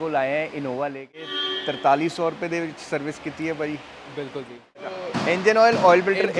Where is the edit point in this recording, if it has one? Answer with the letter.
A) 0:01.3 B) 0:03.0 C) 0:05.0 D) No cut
A